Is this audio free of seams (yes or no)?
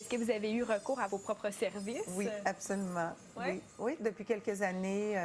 no